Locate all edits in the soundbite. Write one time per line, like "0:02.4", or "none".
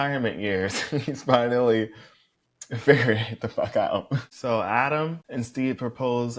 none